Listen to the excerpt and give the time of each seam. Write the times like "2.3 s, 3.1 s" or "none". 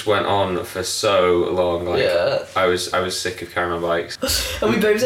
4.1 s